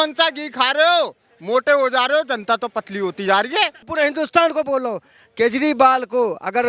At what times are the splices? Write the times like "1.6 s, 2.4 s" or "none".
3.9 s